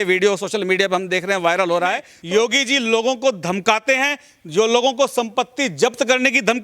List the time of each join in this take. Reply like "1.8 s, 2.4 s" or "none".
2.1 s